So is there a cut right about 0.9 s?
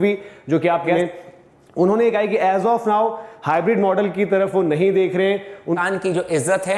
yes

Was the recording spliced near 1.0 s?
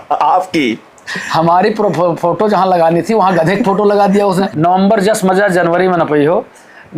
no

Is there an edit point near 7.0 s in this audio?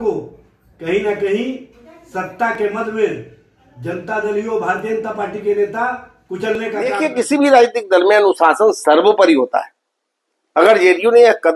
yes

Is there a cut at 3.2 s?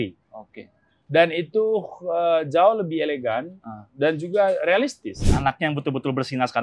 no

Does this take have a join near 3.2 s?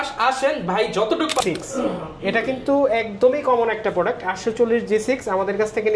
no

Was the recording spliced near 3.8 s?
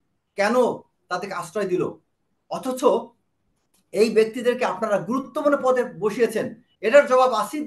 no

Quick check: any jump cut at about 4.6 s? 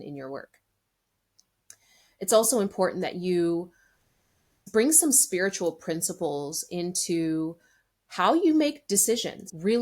yes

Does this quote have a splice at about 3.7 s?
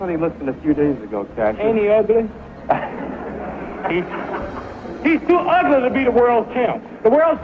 yes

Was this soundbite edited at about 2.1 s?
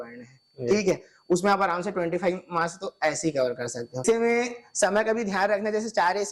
no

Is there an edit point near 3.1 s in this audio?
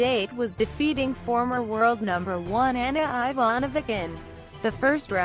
no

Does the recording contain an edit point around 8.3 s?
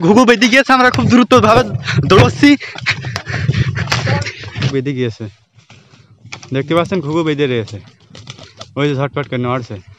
no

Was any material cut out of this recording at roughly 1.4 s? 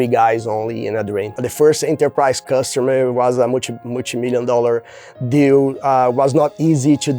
yes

